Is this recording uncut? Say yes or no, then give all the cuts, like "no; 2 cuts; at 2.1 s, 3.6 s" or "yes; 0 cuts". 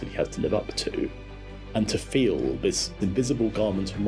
no; 2 cuts; at 1.3 s, 2.9 s